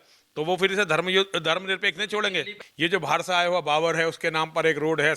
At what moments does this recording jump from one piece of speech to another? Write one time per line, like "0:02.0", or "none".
0:02.6